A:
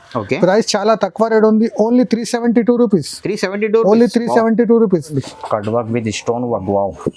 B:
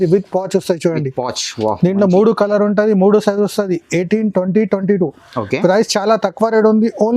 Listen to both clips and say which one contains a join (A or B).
A